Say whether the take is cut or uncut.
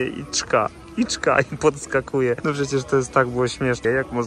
uncut